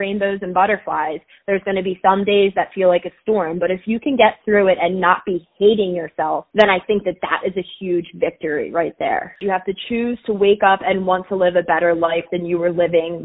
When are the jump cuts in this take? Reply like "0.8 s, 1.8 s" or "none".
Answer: 6.4 s, 9.4 s

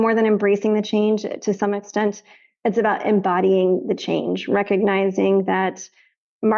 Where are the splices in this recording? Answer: none

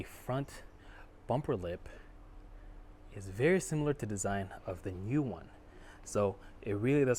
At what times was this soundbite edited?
none

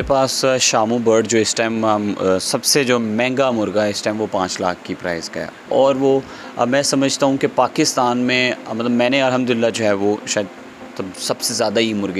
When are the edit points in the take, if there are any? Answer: none

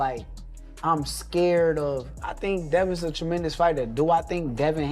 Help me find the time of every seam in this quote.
3.9 s

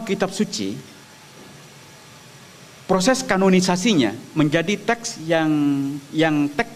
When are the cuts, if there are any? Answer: none

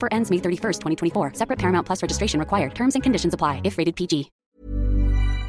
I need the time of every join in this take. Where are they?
4.3 s

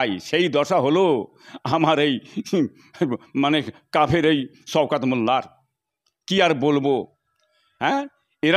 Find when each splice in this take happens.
none

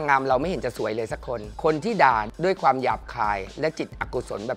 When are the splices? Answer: 1.5 s

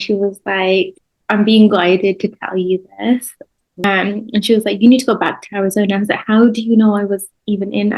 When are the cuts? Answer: 3.8 s

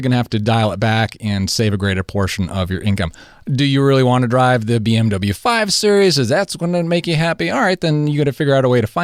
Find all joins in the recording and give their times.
none

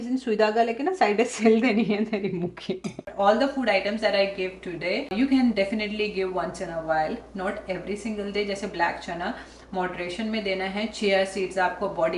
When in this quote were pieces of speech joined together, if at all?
3.1 s, 5.1 s

